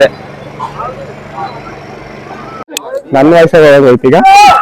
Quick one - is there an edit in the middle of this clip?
yes; 1 cut; at 2.7 s

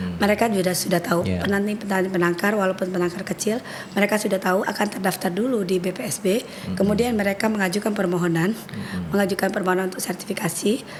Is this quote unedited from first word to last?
yes; 0 cuts

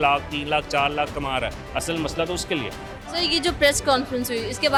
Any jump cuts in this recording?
no; 0 cuts

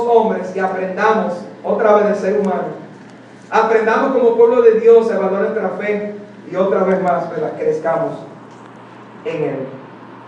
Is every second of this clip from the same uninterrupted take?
no; 1 cut; at 3.3 s

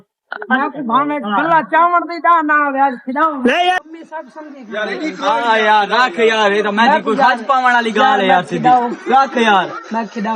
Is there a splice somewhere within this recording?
yes; 1 cut; at 3.8 s

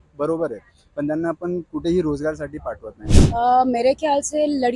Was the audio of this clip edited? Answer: yes; 1 cut; at 3.2 s

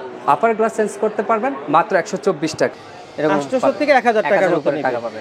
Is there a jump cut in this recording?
yes; 1 cut; at 2.8 s

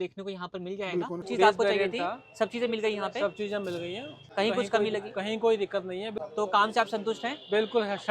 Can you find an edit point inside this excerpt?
yes; 3 cuts; at 1.3 s, 4.1 s, 6.2 s

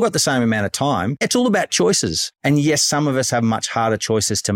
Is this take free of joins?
no; 2 cuts; at 1.3 s, 2.2 s

